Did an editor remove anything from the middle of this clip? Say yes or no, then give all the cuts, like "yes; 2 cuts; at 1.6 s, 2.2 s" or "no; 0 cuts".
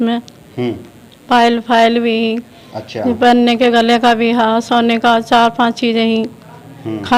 no; 0 cuts